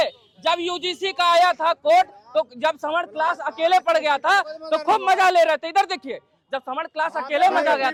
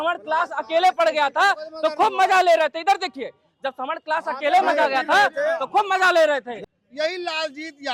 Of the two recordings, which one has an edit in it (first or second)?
second